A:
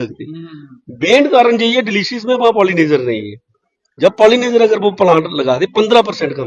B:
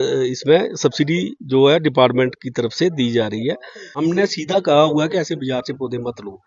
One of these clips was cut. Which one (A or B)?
B